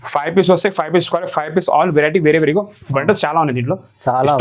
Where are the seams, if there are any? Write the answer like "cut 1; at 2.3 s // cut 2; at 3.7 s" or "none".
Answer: none